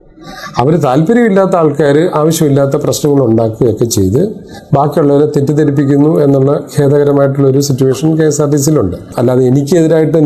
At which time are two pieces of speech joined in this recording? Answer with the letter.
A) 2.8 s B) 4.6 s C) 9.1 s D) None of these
C